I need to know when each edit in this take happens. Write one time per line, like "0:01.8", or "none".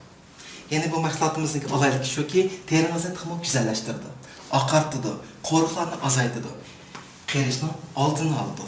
none